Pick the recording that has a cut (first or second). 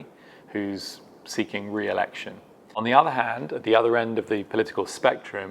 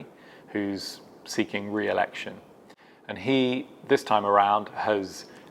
first